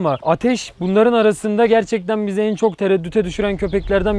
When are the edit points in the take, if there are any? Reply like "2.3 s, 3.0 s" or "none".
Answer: none